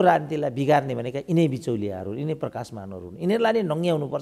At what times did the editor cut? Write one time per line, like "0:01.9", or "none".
none